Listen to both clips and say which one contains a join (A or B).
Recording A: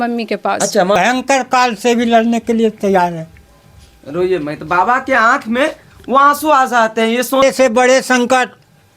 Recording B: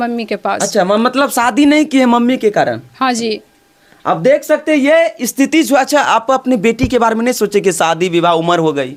A